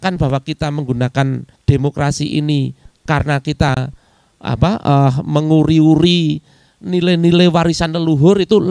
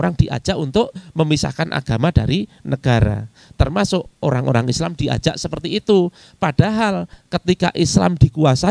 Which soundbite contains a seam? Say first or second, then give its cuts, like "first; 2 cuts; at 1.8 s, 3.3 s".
first; 1 cut; at 1.5 s